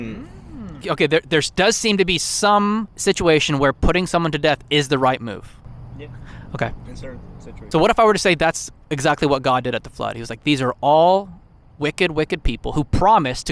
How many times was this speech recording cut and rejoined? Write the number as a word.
three